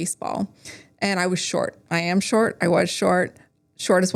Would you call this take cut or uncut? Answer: uncut